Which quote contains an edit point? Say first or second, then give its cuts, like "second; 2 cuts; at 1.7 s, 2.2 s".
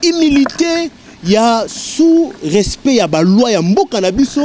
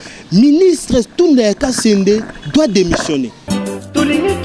second; 1 cut; at 3.4 s